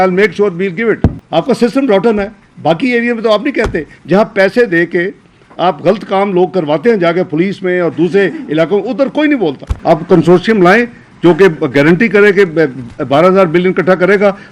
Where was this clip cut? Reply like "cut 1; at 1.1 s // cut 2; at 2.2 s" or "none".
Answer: cut 1; at 1.2 s // cut 2; at 9.7 s

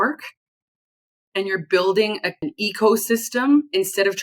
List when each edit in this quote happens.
cut 1; at 2.4 s

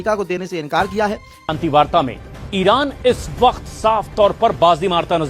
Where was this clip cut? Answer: cut 1; at 1.5 s

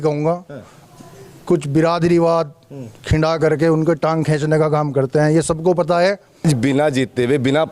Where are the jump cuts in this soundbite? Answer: cut 1; at 6.4 s

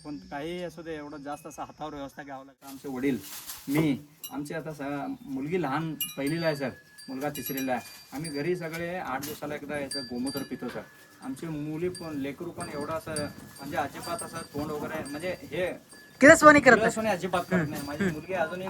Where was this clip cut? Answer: cut 1; at 2.8 s

